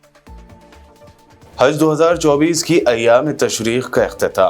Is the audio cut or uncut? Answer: cut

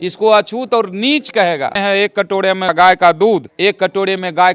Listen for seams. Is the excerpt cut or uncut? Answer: cut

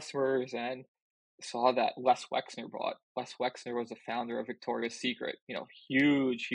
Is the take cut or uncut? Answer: uncut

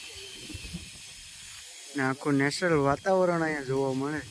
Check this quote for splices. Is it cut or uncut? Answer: uncut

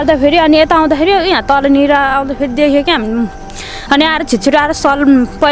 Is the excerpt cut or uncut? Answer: uncut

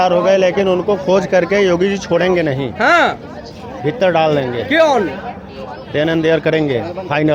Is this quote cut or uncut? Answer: uncut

